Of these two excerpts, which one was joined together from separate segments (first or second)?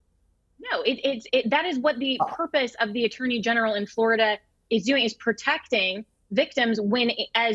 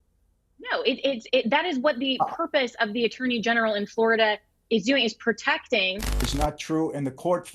second